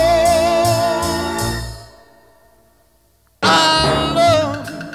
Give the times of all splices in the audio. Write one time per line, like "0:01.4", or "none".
none